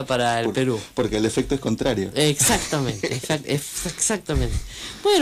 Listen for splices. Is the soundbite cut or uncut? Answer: uncut